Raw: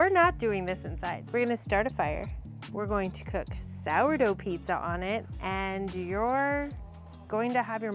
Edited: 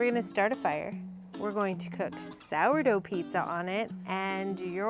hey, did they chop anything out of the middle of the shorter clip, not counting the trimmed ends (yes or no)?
no